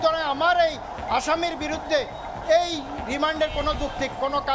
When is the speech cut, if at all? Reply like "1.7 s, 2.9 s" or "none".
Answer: none